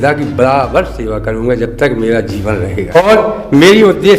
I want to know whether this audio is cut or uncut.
cut